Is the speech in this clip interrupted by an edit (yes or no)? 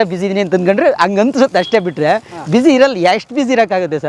no